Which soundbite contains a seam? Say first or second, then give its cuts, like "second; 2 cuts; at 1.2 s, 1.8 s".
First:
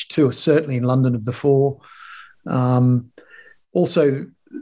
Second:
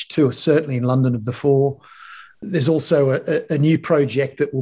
second; 1 cut; at 2.4 s